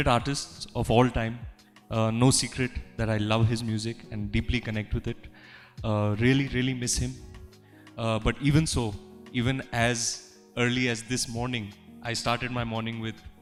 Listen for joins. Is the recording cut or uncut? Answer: uncut